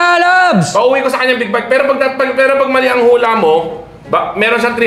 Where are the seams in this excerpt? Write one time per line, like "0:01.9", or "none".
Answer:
none